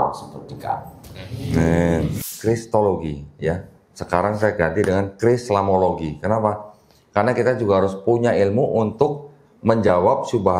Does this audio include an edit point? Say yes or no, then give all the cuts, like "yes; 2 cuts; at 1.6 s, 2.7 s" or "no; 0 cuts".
yes; 1 cut; at 2.2 s